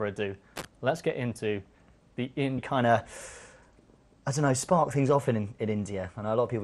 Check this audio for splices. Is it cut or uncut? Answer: uncut